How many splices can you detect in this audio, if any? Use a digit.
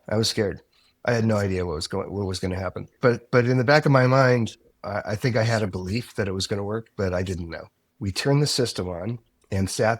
2